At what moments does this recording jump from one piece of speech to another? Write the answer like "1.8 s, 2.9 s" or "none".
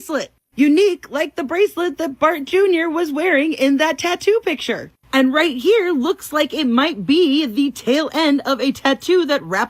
none